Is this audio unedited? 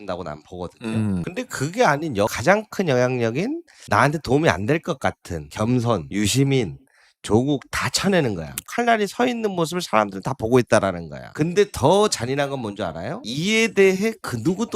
no; 1 cut; at 8.6 s

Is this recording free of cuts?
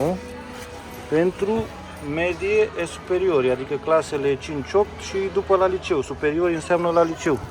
yes; 0 cuts

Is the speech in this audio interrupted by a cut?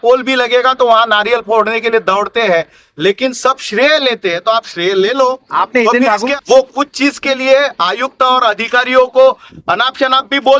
yes; 1 cut; at 6.4 s

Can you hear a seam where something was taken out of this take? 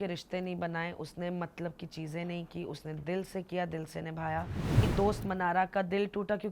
yes; 1 cut; at 4.9 s

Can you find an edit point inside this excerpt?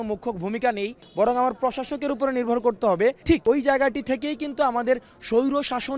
yes; 2 cuts; at 1.0 s, 3.3 s

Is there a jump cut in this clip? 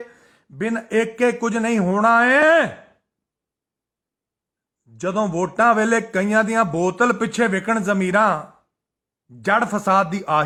no; 0 cuts

